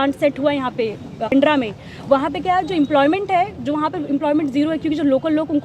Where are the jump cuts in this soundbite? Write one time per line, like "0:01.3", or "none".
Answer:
0:01.3